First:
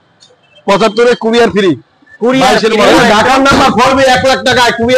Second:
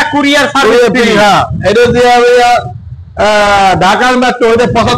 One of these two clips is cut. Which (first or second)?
first